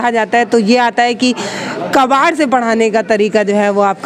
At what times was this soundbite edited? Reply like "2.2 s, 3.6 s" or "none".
none

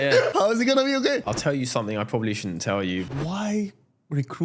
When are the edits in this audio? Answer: 1.2 s, 3.1 s

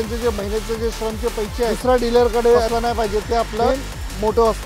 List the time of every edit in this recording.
1.8 s, 2.7 s, 3.7 s

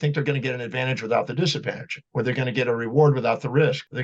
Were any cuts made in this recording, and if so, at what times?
none

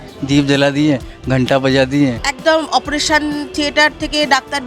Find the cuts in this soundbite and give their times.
2.3 s

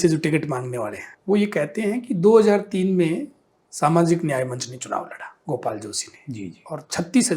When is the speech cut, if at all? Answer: 1.1 s, 5.4 s

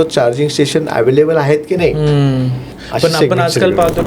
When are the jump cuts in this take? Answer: 2.8 s

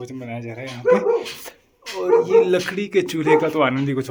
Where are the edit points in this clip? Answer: none

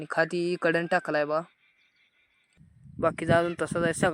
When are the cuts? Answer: 2.5 s

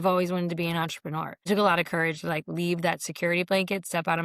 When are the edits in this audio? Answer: 1.4 s

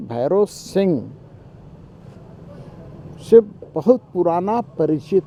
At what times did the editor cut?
none

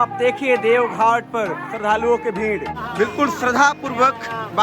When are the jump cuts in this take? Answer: 2.8 s

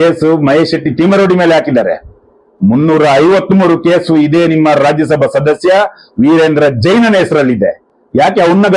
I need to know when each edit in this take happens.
none

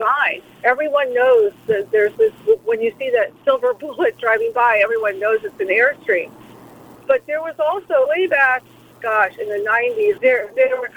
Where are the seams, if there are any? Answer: 3.4 s

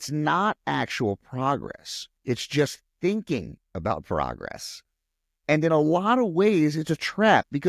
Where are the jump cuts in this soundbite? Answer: none

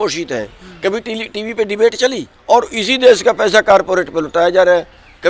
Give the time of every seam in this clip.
2.3 s

